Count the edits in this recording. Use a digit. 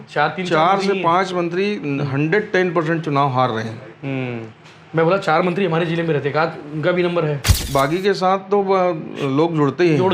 1